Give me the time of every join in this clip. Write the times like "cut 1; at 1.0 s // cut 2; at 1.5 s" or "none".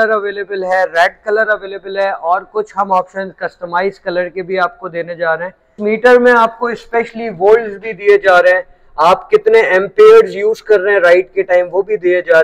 cut 1; at 5.8 s

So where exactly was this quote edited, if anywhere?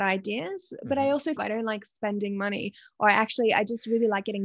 cut 1; at 1.4 s

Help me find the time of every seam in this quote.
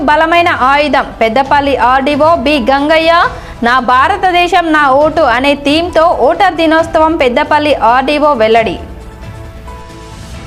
none

